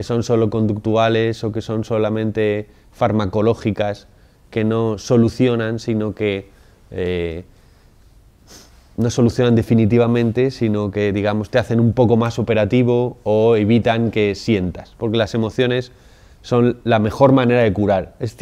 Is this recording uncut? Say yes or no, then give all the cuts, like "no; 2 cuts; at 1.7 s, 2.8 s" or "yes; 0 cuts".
no; 1 cut; at 4.8 s